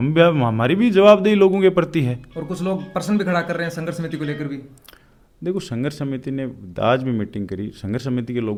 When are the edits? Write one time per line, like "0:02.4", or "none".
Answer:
none